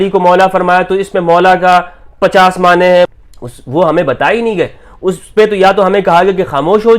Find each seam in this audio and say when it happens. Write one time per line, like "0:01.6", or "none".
0:03.1